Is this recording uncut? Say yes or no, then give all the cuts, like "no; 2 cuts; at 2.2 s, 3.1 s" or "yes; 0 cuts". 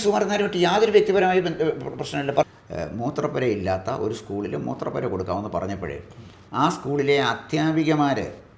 no; 1 cut; at 2.4 s